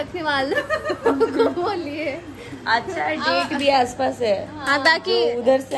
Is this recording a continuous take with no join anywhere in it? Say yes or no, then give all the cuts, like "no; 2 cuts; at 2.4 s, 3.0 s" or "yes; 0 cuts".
yes; 0 cuts